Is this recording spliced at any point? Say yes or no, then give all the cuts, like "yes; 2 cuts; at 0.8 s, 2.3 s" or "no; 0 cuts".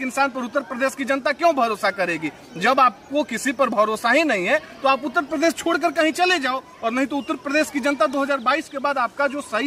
no; 0 cuts